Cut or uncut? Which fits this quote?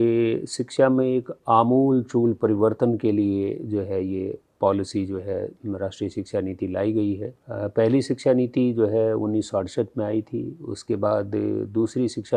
uncut